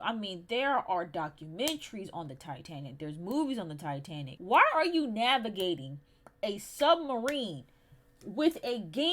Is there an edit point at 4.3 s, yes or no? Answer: yes